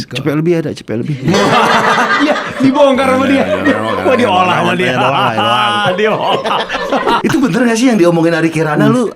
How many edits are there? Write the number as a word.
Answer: one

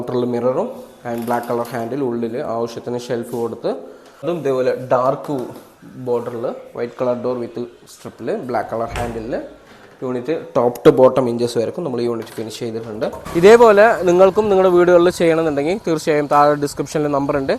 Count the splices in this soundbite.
two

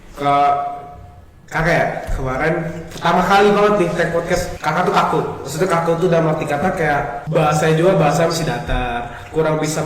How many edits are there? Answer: two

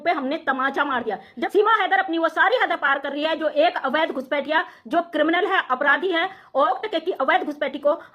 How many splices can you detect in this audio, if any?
two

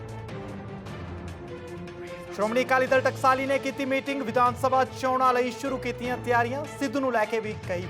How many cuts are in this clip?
one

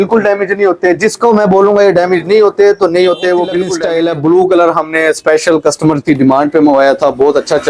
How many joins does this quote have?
one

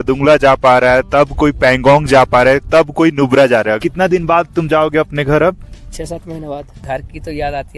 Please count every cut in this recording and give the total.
two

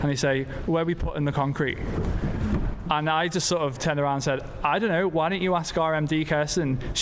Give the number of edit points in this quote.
zero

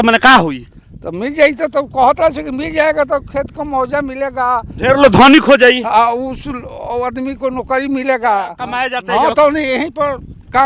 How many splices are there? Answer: one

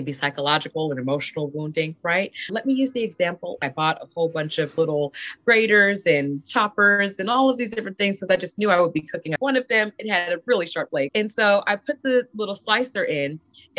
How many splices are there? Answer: four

